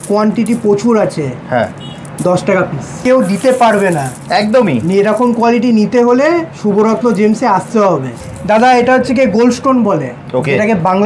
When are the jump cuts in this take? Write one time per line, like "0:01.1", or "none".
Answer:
0:03.0
0:08.2